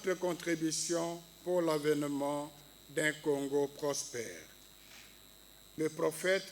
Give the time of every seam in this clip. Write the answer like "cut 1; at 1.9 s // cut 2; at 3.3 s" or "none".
cut 1; at 5.6 s